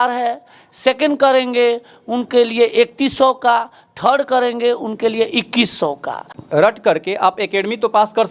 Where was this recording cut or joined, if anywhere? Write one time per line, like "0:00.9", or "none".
0:06.4